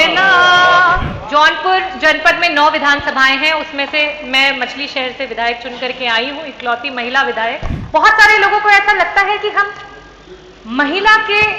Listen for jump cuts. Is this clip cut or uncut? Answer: cut